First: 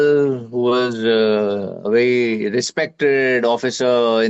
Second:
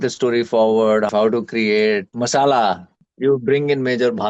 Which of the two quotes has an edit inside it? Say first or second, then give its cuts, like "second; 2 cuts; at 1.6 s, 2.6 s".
second; 3 cuts; at 1.1 s, 2.1 s, 3.0 s